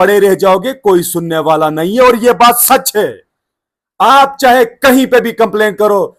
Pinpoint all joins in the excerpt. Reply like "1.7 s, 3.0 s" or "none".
none